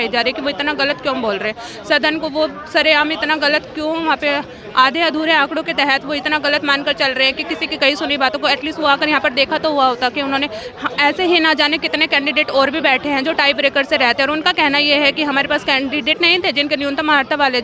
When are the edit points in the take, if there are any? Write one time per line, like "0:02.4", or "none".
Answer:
none